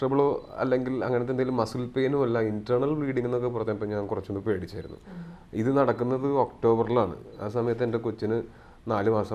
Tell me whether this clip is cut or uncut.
uncut